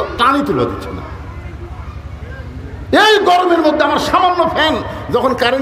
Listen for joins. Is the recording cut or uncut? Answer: uncut